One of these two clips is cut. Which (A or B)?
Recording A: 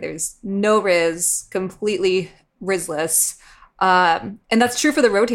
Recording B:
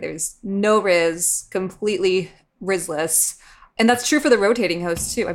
B